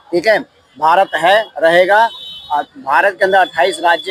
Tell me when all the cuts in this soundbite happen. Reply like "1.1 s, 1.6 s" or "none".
none

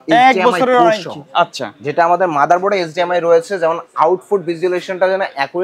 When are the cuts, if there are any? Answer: none

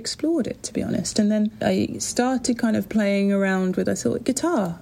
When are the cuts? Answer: 1.6 s

